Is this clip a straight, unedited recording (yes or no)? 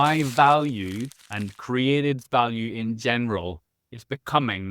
yes